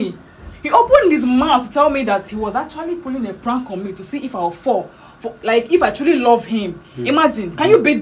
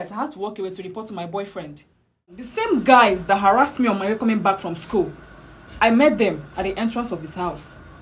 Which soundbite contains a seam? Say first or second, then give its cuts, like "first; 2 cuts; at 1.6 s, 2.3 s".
second; 1 cut; at 2.5 s